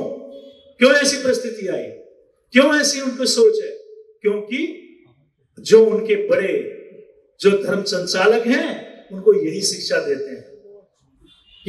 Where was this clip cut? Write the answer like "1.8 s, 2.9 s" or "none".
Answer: none